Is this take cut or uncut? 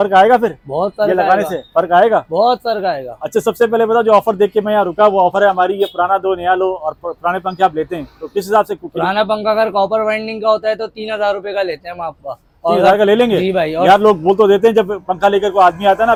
uncut